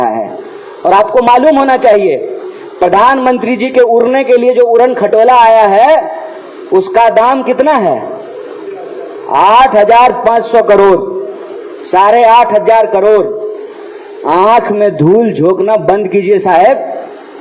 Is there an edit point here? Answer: no; 0 cuts

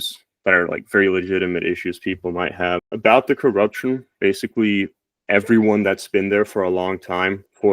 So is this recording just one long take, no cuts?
no; 1 cut; at 2.9 s

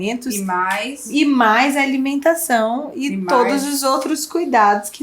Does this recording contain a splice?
yes; 1 cut; at 1.0 s

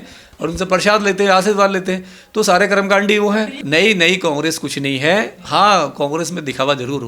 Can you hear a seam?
yes; 1 cut; at 3.6 s

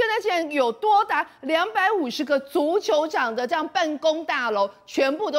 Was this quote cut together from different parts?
no; 0 cuts

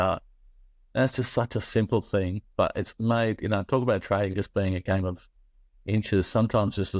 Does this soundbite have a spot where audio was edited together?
no; 0 cuts

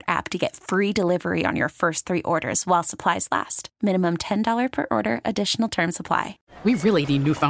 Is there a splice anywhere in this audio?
yes; 1 cut; at 6.4 s

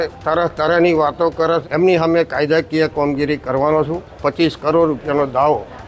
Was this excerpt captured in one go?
no; 2 cuts; at 1.6 s, 4.0 s

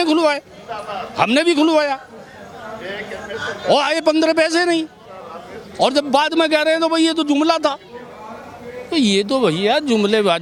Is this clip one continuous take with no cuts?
yes; 0 cuts

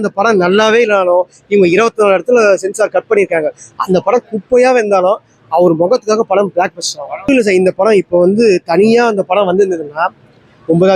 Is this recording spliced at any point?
yes; 1 cut; at 7.3 s

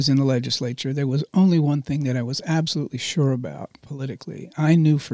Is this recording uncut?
yes; 0 cuts

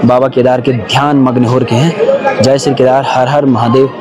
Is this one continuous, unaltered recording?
yes; 0 cuts

